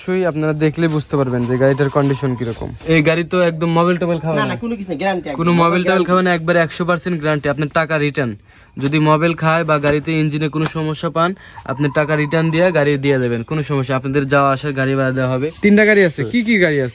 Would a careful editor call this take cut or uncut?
cut